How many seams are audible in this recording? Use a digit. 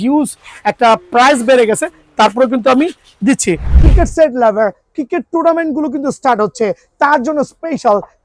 1